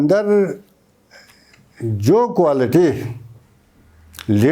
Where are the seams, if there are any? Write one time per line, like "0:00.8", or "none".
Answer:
none